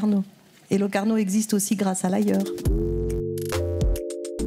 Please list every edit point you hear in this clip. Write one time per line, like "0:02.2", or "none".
0:02.5